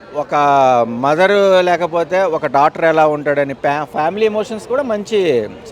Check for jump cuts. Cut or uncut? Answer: uncut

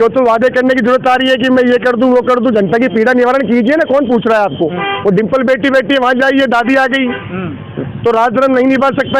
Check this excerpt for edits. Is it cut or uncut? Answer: uncut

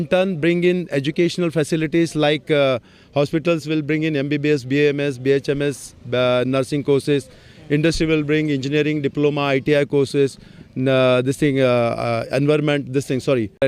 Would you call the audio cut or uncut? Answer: uncut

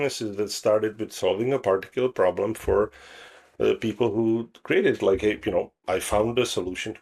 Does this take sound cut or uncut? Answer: cut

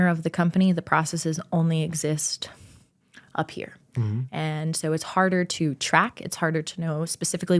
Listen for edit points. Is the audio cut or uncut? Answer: uncut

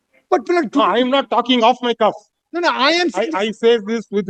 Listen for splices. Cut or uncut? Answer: uncut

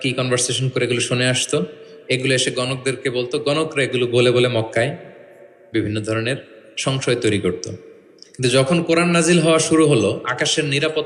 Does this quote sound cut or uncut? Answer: uncut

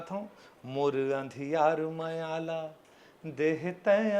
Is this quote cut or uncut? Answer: uncut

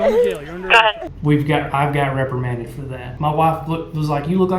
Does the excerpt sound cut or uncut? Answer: cut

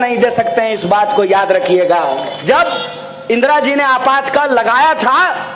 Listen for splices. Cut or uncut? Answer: cut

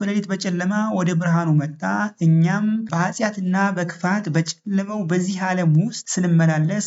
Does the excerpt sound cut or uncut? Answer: cut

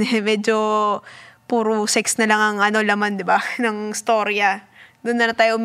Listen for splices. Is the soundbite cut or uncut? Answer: uncut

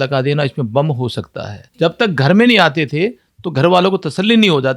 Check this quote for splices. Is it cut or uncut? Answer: cut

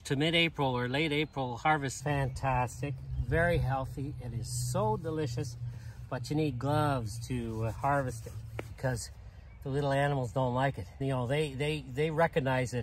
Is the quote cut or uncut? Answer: cut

